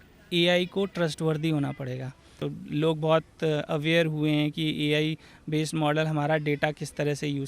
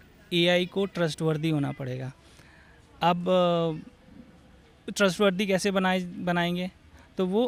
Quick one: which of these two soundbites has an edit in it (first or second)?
first